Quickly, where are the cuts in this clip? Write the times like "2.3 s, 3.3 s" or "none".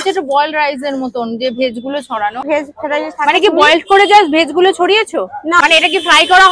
2.4 s, 5.6 s